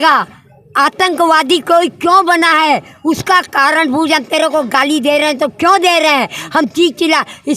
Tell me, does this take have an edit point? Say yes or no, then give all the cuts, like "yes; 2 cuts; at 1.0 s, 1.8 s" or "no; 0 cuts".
no; 0 cuts